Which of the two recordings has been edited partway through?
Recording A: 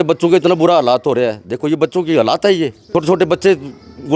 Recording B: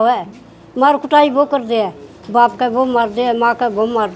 A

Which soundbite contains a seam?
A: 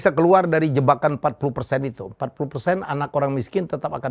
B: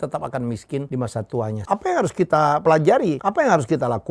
B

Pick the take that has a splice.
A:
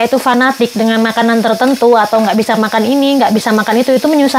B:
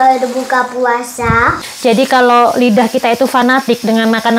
B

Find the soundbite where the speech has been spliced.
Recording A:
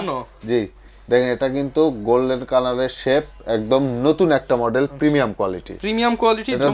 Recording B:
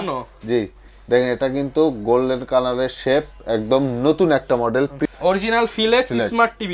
B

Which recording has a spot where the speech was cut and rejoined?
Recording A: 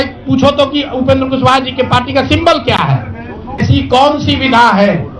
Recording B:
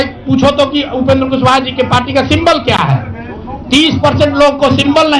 A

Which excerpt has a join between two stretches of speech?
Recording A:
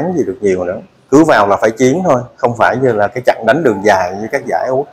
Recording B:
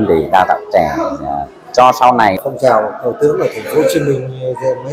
B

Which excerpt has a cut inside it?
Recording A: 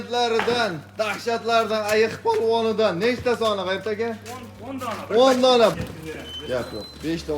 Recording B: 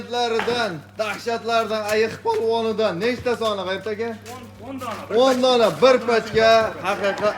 A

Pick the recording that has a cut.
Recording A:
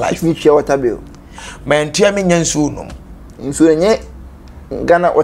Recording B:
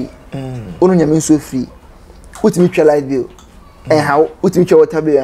B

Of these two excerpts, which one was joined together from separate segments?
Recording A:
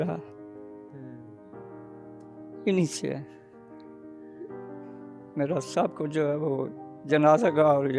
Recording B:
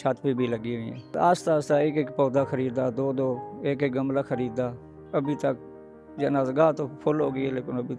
B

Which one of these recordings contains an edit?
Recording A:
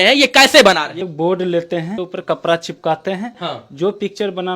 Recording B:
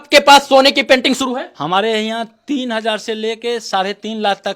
A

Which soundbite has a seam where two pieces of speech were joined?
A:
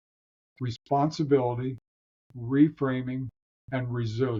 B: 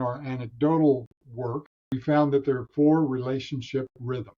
B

